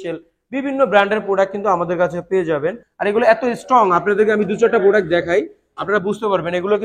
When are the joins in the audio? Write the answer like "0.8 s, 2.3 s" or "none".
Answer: 2.9 s